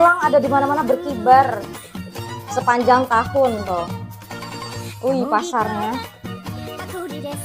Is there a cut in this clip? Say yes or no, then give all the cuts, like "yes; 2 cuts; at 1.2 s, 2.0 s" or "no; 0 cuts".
no; 0 cuts